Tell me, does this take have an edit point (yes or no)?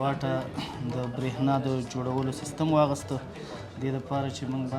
no